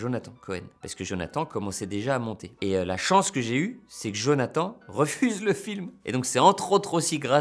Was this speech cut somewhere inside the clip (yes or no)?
yes